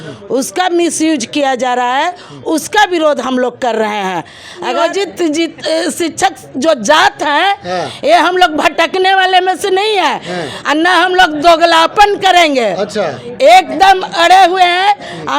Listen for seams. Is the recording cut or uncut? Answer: cut